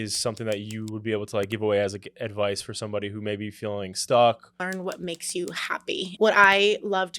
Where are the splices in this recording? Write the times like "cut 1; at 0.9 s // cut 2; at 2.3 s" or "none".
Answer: cut 1; at 4.7 s // cut 2; at 6.1 s